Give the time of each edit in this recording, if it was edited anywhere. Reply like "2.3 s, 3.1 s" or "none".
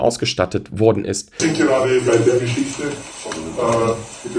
1.4 s